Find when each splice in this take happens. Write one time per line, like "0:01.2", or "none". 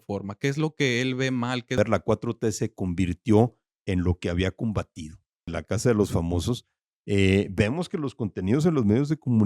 0:01.8
0:05.6

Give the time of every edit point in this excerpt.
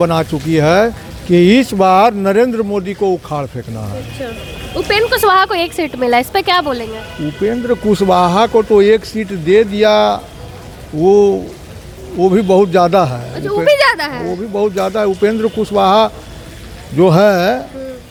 none

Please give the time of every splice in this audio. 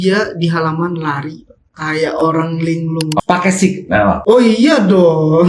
0:03.2

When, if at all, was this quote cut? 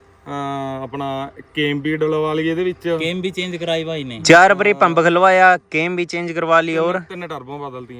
none

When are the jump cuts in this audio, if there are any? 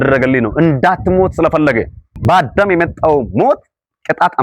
0:02.2

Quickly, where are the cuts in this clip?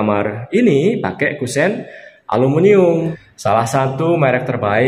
0:03.1

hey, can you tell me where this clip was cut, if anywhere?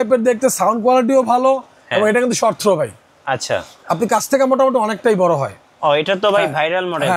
0:05.7

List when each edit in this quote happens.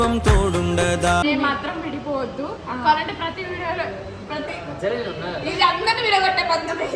0:01.2

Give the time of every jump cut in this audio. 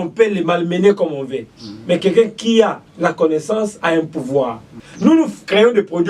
0:04.8

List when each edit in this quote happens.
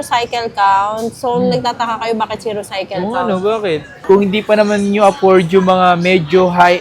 0:04.0

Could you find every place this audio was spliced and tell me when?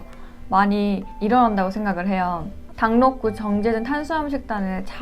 0:02.7

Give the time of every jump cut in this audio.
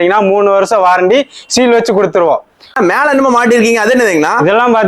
0:02.8

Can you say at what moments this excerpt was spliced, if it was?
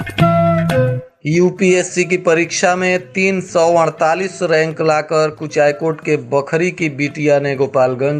0:01.0

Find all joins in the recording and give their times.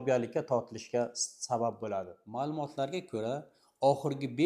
0:02.2

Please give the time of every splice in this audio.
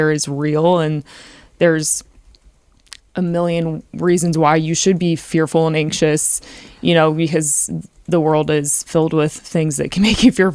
none

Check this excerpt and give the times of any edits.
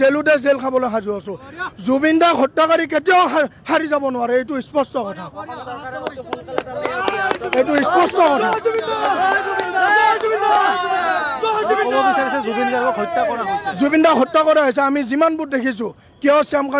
none

